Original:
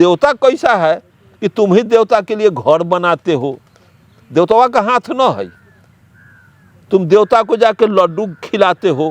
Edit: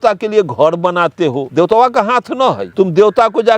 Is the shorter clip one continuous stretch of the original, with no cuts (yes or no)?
no